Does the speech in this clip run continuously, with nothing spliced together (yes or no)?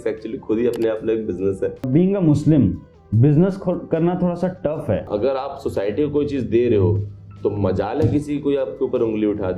no